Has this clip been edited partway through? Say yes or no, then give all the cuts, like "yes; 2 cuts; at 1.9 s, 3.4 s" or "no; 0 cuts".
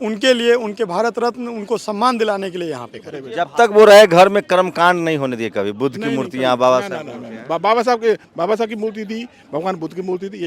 yes; 1 cut; at 3.2 s